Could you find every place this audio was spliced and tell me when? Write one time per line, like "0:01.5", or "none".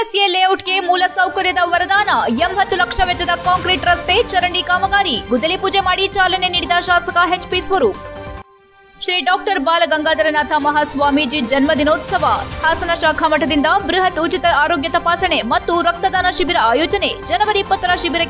none

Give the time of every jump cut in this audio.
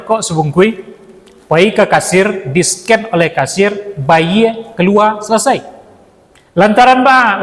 none

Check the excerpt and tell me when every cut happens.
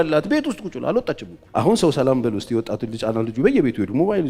0:01.3

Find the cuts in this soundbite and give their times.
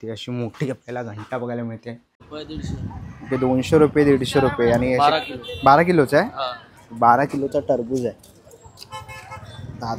0:02.3

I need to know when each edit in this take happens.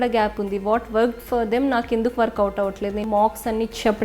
0:03.0

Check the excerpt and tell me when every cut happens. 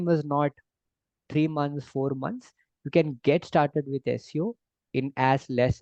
none

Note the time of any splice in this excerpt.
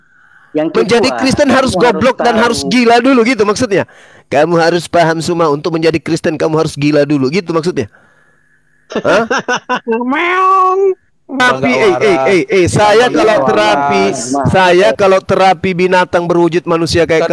0:11.4

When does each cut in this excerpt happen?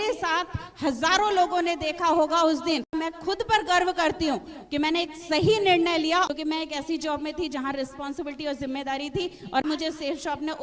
0:02.9
0:06.3
0:09.6

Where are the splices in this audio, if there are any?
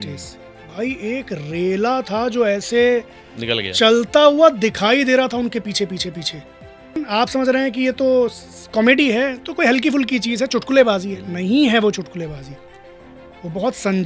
0:07.0

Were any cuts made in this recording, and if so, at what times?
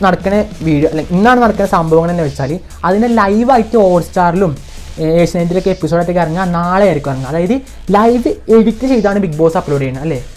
none

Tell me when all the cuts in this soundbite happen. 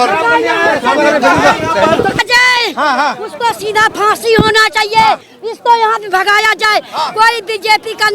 0:02.2

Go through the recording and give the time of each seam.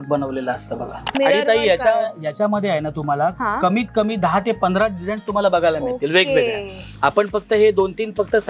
0:01.1

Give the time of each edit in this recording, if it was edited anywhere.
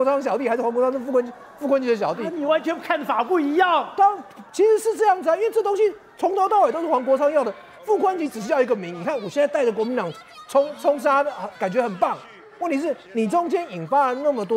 none

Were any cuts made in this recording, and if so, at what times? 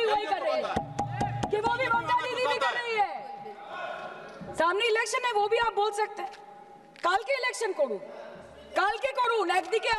none

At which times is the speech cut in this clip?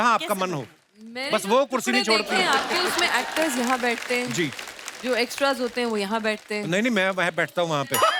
none

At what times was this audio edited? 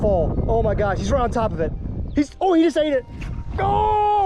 none

